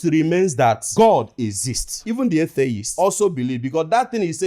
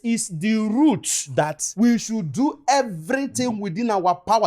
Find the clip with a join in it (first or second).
first